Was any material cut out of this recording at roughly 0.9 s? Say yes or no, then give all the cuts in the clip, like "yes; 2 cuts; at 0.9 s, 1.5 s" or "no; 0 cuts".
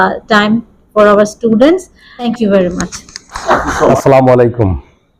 no; 2 cuts; at 2.3 s, 3.9 s